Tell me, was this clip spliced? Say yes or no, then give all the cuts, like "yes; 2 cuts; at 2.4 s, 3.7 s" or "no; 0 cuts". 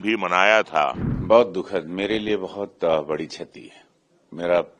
yes; 1 cut; at 1.1 s